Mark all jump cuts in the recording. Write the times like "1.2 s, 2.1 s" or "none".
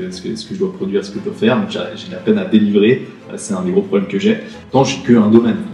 4.6 s